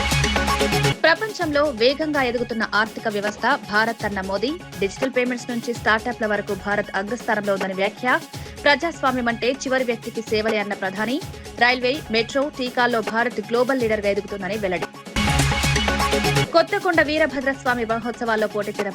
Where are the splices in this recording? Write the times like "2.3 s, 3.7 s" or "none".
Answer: 0.9 s